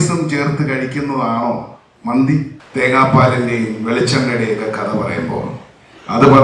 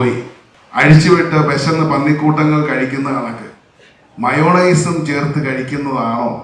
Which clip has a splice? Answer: first; 1 cut; at 2.6 s

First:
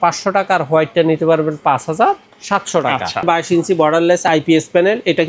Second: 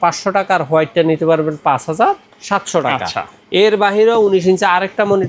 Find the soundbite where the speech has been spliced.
first; 1 cut; at 3.3 s

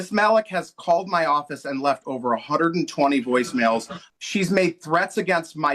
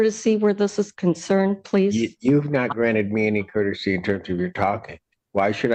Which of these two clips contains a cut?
first; 1 cut; at 4.0 s

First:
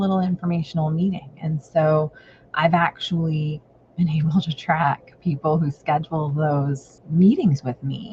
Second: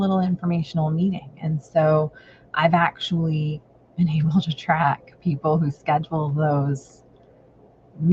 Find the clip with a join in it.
first; 1 cut; at 6.9 s

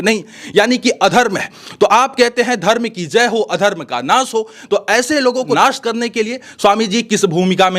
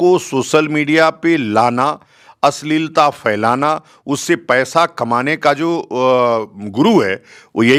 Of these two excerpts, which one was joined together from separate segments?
first; 1 cut; at 5.6 s

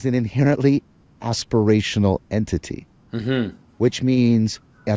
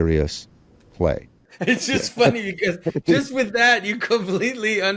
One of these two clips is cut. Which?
second; 1 cut; at 1.5 s

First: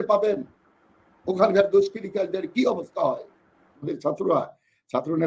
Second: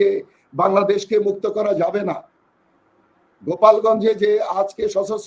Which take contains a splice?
first; 1 cut; at 3.9 s

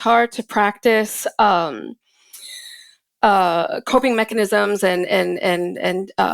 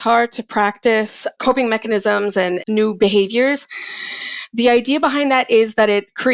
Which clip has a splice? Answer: second; 2 cuts; at 1.3 s, 2.6 s

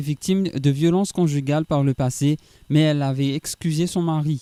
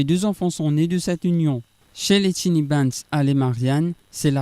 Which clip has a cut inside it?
second; 1 cut; at 2.0 s

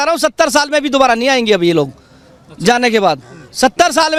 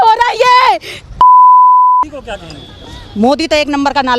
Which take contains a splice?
second; 1 cut; at 1.9 s

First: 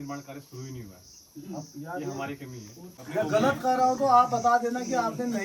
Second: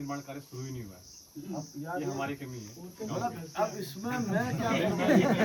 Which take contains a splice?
first; 1 cut; at 2.9 s

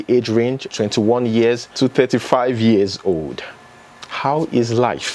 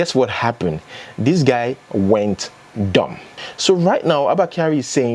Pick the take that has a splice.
second; 1 cut; at 3.3 s

